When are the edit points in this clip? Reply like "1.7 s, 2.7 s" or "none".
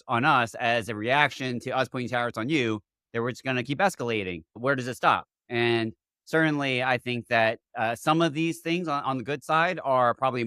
4.6 s